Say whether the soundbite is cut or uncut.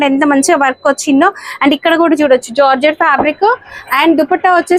uncut